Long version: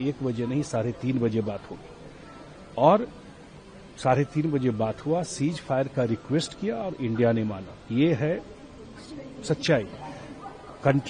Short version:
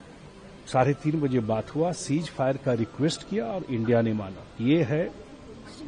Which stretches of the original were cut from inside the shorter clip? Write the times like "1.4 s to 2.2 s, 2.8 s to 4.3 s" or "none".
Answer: none

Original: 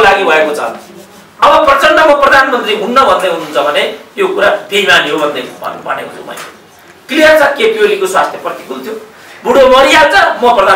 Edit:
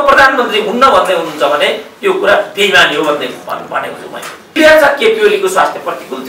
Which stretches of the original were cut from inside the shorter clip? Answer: 6.7 s to 7.1 s

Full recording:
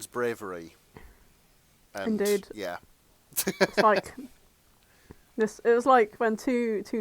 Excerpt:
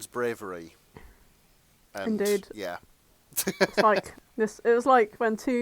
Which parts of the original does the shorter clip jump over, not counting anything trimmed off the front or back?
4.2 s to 5.2 s

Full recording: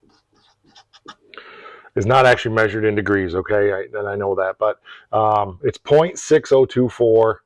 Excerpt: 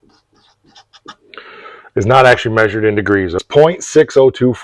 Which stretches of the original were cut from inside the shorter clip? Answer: 3.4 s to 5.8 s

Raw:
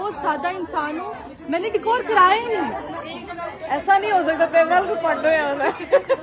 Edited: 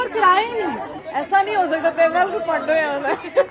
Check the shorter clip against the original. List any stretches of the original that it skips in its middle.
2.9 s to 3.5 s

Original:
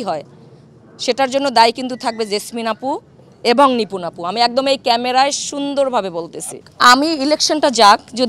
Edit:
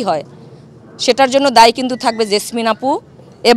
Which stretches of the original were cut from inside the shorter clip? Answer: none

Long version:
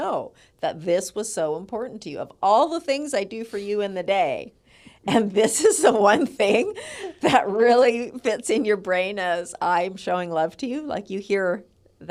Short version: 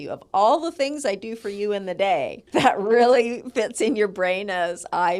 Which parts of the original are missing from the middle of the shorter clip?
4.4 s to 7.0 s

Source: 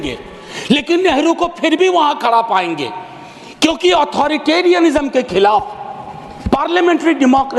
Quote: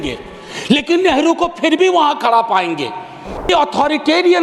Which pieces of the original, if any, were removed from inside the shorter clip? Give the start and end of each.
3.5 s to 3.9 s

